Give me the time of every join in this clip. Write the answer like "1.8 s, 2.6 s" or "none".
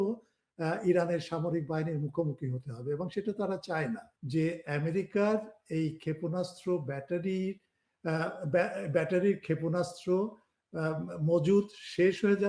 4.1 s